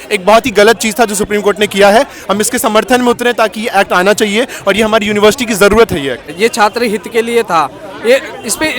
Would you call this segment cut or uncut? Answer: cut